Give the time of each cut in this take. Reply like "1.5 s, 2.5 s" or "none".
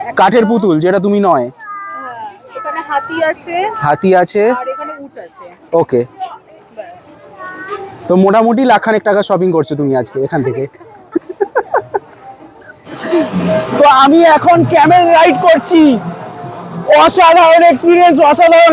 13.3 s